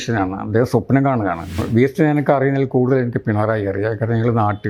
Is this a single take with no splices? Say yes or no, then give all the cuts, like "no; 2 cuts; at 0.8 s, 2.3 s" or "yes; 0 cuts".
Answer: no; 1 cut; at 1.6 s